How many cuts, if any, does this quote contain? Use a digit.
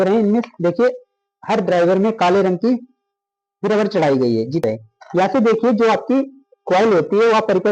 1